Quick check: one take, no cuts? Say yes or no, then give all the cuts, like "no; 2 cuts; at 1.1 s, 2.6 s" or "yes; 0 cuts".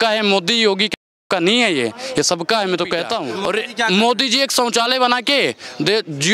no; 1 cut; at 3.2 s